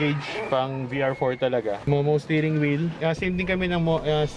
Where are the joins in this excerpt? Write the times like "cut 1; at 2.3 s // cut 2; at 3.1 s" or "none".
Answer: cut 1; at 1.8 s // cut 2; at 3.0 s